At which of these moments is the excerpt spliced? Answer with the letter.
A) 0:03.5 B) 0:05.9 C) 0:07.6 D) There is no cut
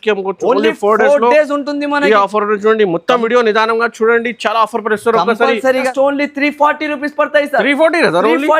B